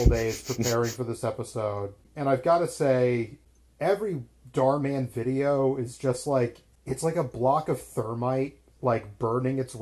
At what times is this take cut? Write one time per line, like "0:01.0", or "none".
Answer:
0:02.0
0:03.4
0:06.7